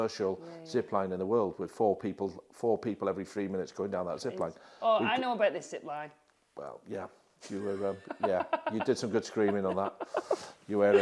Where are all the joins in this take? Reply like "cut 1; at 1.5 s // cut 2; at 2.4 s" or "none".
none